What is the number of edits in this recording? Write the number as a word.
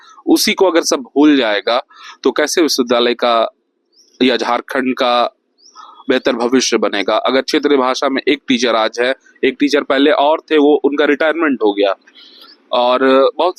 zero